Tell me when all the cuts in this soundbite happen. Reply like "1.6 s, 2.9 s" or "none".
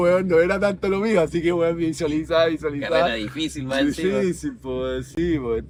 none

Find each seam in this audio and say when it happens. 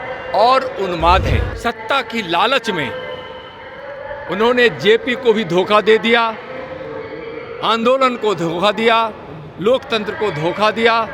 1.5 s

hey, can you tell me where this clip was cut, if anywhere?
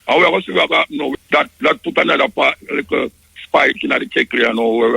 1.2 s

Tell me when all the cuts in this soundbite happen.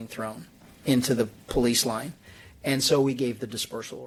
none

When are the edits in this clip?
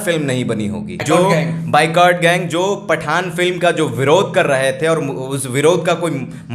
0.9 s

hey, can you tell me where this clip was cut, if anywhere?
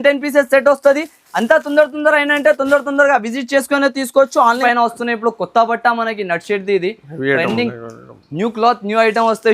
4.6 s

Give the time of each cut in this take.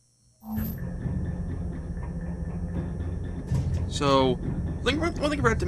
none

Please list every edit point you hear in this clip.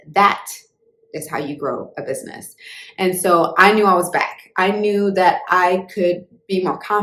none

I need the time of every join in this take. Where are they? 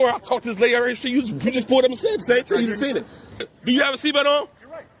3.5 s

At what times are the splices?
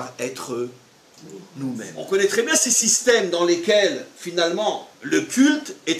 2.0 s

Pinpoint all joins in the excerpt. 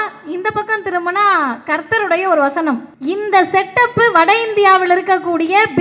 2.9 s

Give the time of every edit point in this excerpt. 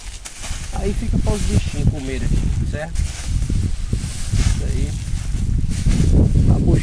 none

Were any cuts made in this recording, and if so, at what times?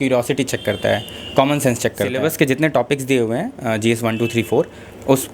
2.1 s

